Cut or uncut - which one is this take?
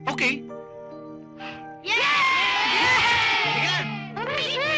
uncut